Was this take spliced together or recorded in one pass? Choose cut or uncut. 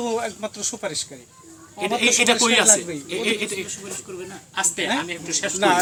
uncut